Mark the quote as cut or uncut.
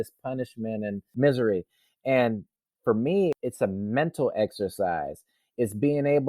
cut